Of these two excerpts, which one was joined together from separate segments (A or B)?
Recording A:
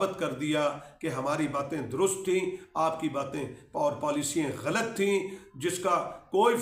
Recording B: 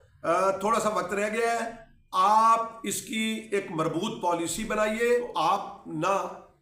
B